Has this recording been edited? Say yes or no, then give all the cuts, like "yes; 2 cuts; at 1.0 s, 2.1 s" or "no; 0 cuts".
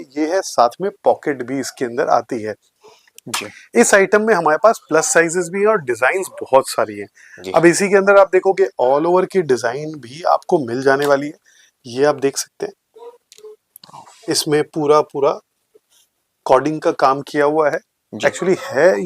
no; 0 cuts